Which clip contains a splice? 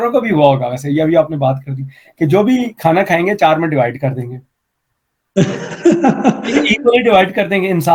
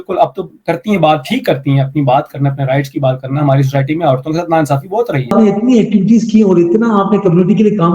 second; 1 cut; at 5.3 s

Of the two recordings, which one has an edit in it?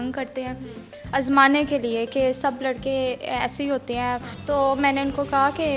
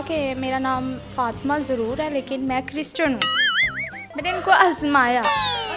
first; 2 cuts; at 0.9 s, 4.3 s

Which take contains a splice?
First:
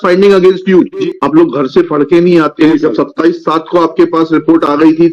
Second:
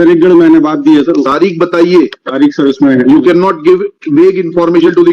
first; 2 cuts; at 1.0 s, 2.7 s

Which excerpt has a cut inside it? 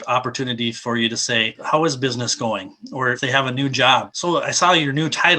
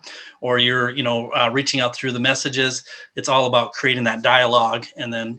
first; 3 cuts; at 1.6 s, 3.2 s, 4.1 s

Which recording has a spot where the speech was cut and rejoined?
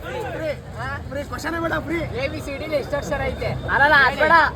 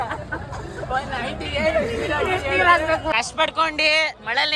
second; 1 cut; at 3.0 s

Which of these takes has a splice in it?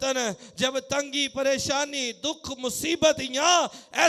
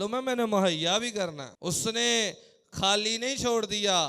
second; 1 cut; at 1.5 s

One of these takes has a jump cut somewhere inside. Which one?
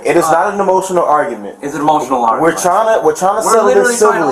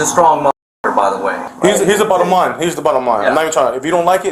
second; 1 cut; at 1.5 s

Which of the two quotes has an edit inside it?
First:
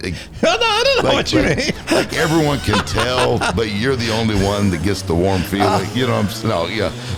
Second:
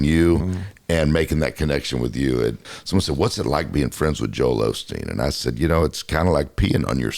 second; 1 cut; at 2.6 s

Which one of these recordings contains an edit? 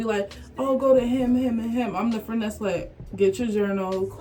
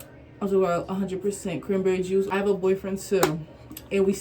second; 1 cut; at 2.3 s

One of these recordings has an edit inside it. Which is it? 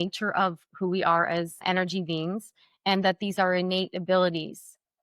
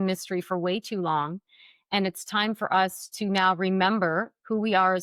first; 1 cut; at 1.6 s

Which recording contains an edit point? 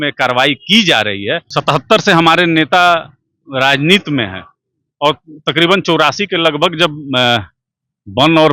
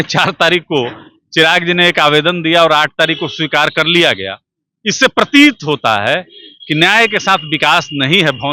first; 1 cut; at 1.5 s

